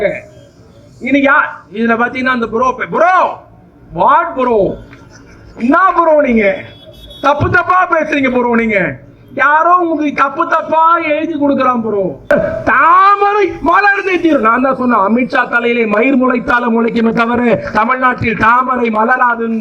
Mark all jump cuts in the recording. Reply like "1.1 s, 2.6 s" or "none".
12.3 s